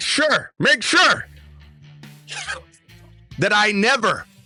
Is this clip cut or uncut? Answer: uncut